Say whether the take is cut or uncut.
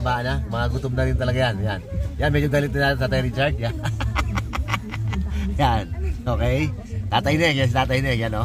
uncut